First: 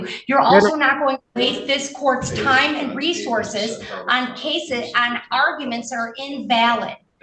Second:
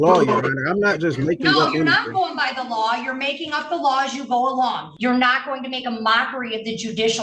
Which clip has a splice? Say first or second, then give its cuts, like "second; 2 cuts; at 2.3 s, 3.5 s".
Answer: second; 1 cut; at 4.9 s